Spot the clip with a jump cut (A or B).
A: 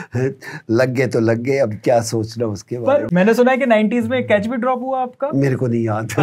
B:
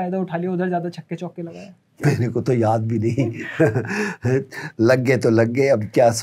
A